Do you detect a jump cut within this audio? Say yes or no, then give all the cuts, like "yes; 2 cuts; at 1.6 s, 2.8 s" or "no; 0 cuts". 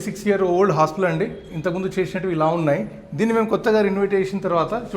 no; 0 cuts